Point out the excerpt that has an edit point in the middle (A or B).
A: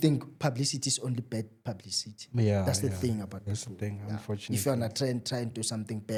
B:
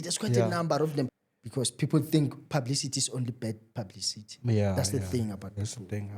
B